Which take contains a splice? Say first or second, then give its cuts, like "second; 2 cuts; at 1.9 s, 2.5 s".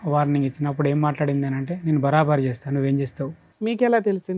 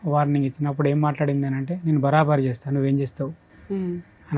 first; 1 cut; at 3.4 s